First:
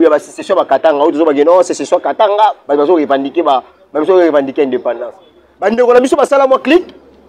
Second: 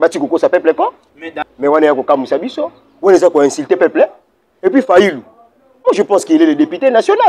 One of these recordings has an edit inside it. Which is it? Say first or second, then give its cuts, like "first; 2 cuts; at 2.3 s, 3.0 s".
second; 1 cut; at 1.4 s